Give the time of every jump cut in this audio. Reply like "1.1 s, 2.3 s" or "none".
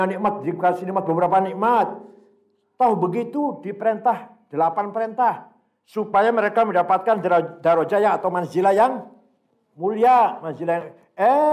none